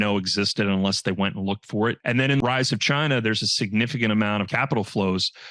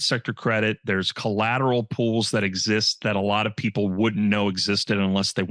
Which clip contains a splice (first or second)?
first